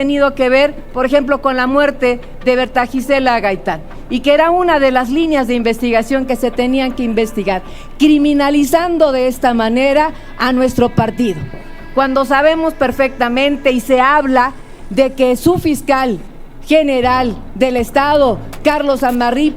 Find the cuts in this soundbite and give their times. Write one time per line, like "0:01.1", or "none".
0:11.7